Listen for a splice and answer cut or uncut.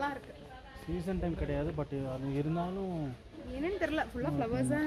uncut